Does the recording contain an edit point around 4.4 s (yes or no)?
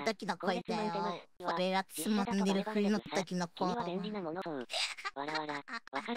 yes